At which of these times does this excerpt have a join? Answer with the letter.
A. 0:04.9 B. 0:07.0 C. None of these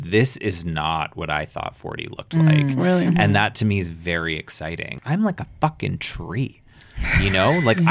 A